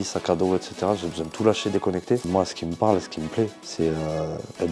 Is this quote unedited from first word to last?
no; 2 cuts; at 2.2 s, 3.6 s

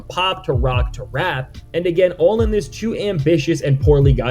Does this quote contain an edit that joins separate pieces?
no; 0 cuts

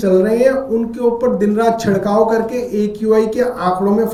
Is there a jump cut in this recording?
no; 0 cuts

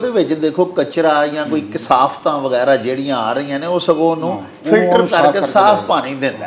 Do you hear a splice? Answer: no; 0 cuts

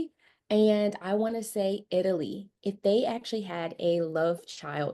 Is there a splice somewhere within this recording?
no; 0 cuts

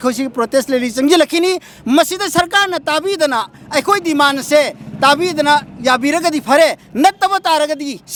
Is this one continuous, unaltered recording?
yes; 0 cuts

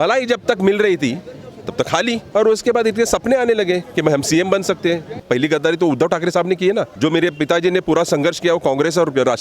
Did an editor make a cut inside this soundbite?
yes; 3 cuts; at 2.2 s, 5.2 s, 6.9 s

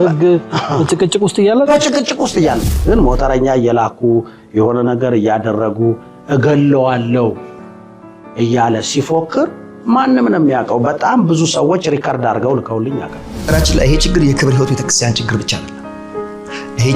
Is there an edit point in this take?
yes; 2 cuts; at 2.6 s, 13.5 s

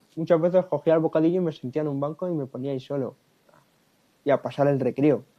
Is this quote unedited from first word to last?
yes; 0 cuts

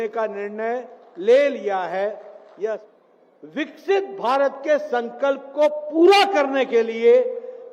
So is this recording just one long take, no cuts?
no; 1 cut; at 2.8 s

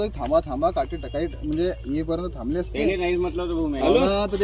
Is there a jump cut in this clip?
no; 0 cuts

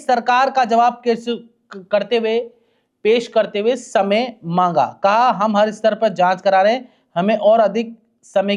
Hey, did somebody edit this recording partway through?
no; 0 cuts

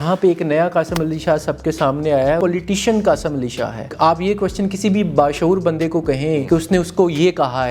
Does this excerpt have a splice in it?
yes; 3 cuts; at 2.4 s, 3.9 s, 6.4 s

